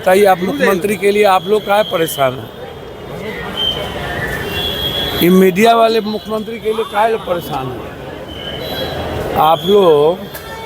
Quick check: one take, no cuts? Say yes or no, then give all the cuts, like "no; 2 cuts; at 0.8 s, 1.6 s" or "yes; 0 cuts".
yes; 0 cuts